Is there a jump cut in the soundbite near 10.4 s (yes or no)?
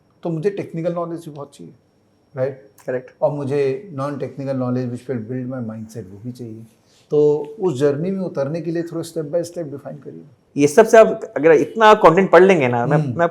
yes